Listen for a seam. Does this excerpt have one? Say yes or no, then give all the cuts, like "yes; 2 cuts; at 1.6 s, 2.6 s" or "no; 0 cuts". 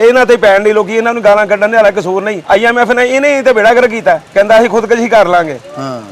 yes; 2 cuts; at 2.3 s, 4.3 s